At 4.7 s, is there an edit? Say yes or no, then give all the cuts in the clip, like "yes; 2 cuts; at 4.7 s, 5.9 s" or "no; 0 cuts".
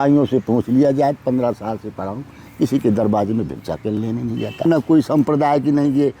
yes; 1 cut; at 4.7 s